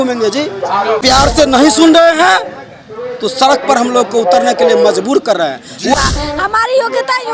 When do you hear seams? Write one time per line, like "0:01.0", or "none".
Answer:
0:01.0
0:05.9